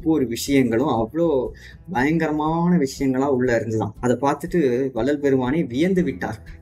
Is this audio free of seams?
yes; 0 cuts

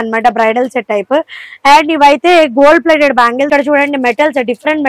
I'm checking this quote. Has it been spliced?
yes; 1 cut; at 3.5 s

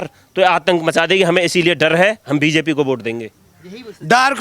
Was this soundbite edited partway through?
no; 0 cuts

